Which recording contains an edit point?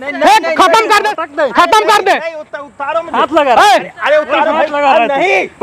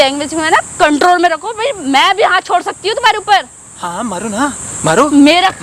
first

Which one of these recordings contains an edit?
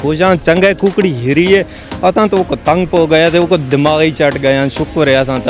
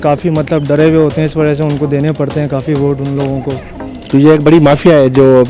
second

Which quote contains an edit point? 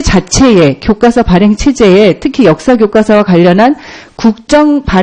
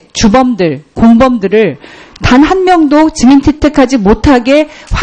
first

